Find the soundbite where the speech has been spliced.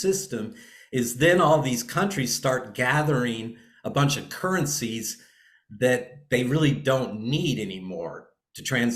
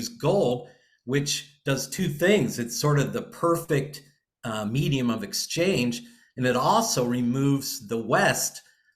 second; 1 cut; at 3.6 s

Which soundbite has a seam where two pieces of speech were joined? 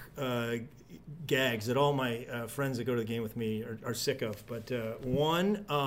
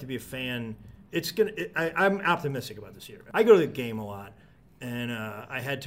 second; 2 cuts; at 0.9 s, 3.2 s

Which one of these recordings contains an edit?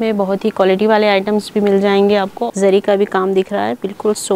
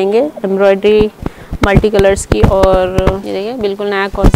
first; 1 cut; at 2.4 s

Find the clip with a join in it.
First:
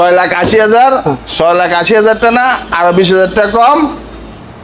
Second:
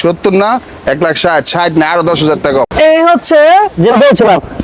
second; 1 cut; at 2.7 s

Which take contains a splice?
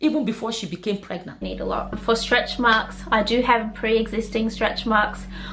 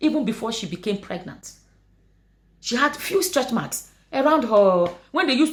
first; 1 cut; at 1.5 s

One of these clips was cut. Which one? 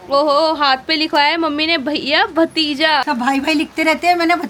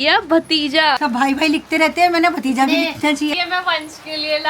second; 1 cut; at 3.3 s

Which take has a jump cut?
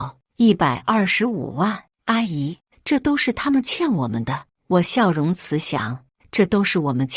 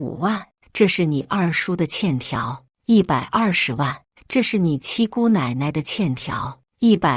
first; 1 cut; at 1.9 s

